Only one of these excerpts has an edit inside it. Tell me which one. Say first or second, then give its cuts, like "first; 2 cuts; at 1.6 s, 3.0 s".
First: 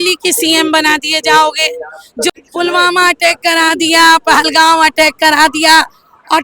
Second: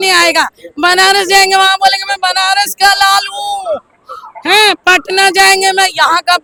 first; 1 cut; at 2.3 s